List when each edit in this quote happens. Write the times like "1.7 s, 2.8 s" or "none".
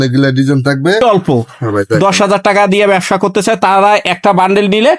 1.0 s